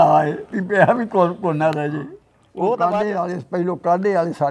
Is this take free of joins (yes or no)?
no